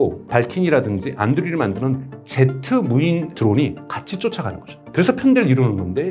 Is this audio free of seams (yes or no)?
yes